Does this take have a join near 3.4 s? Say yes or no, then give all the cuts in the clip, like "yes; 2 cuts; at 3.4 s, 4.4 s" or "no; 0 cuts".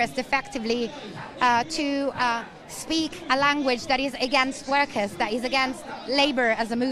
no; 0 cuts